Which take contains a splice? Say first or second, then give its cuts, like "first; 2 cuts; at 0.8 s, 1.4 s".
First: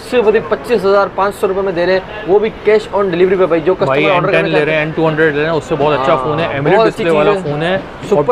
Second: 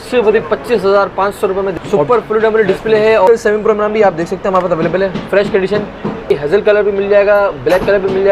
second; 3 cuts; at 1.7 s, 3.3 s, 6.3 s